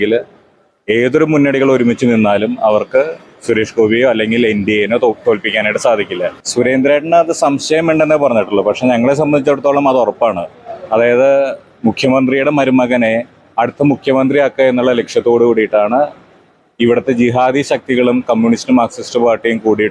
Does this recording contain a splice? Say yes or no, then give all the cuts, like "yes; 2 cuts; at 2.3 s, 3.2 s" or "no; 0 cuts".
yes; 1 cut; at 6.4 s